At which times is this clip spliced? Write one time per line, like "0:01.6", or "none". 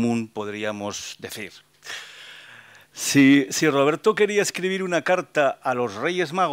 0:03.9